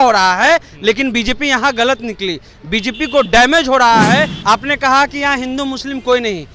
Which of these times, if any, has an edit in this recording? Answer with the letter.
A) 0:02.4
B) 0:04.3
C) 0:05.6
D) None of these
B